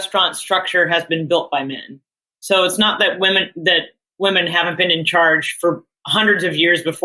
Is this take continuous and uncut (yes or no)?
no